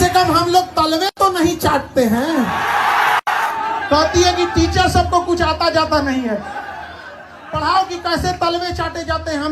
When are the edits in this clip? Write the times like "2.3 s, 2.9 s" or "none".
3.6 s, 6.6 s

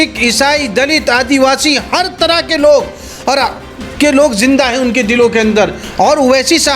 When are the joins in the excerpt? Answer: 5.8 s

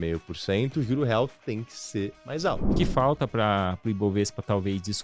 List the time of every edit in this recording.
2.7 s

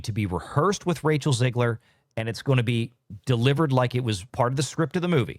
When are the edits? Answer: 4.2 s

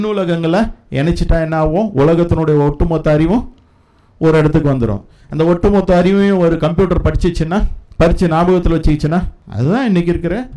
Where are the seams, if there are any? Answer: 7.8 s, 9.4 s

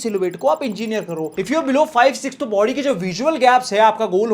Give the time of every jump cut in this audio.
none

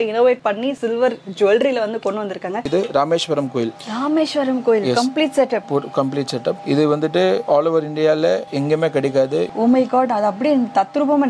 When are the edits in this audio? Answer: 2.7 s, 9.5 s

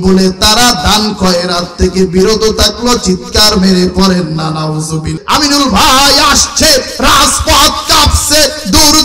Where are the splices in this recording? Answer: 5.2 s

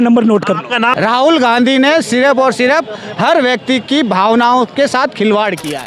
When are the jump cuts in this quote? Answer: 0.9 s

